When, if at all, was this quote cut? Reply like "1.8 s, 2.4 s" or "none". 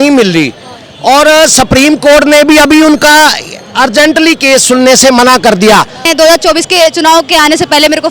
6.0 s